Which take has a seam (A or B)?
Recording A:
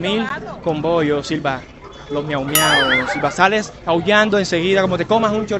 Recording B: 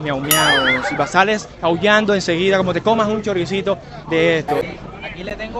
B